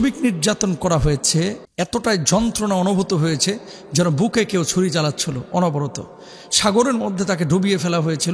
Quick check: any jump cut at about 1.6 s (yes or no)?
yes